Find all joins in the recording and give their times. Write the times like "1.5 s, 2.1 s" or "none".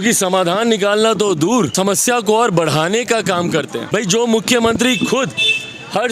1.7 s, 3.8 s